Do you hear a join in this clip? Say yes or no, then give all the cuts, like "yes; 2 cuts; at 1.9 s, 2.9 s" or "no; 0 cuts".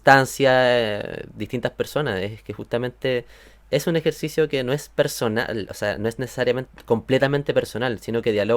no; 0 cuts